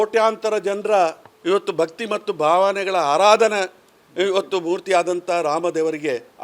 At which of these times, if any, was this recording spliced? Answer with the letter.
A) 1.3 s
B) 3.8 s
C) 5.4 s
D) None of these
D